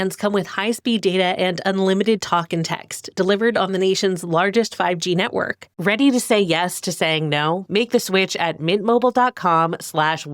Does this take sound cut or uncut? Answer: cut